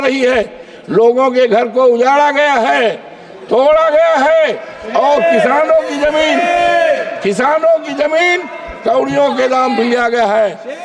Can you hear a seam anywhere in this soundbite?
no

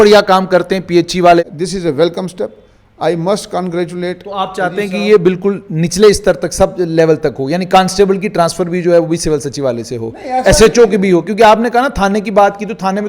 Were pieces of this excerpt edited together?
yes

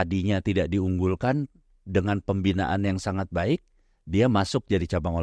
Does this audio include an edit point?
no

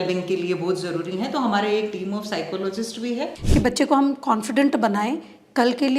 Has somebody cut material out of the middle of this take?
yes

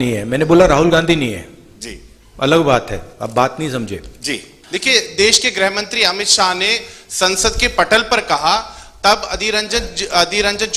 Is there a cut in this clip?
yes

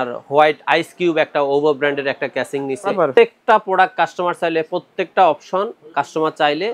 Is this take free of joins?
no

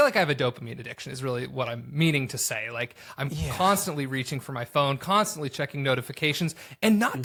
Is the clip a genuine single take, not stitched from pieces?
yes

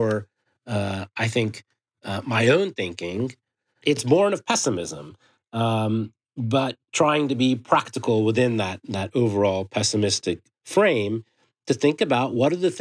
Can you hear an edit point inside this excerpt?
yes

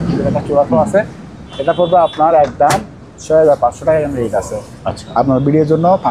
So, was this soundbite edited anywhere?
no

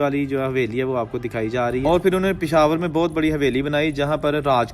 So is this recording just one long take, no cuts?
no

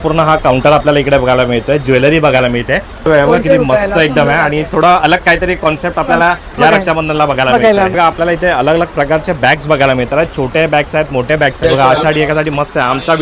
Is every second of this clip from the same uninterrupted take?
no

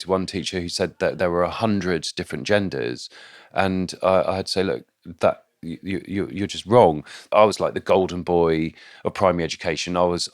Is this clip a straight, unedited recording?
no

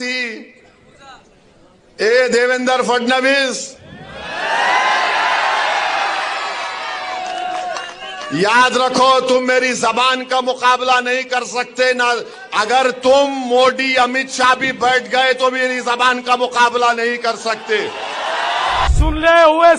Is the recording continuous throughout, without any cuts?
no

